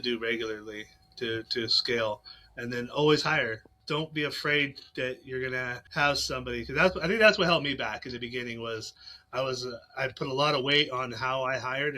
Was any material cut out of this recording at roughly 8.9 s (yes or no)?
no